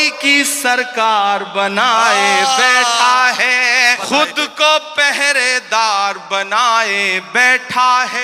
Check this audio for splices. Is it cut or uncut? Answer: cut